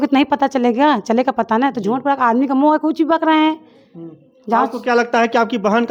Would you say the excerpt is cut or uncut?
uncut